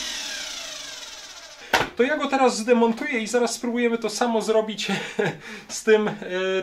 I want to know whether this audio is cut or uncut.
cut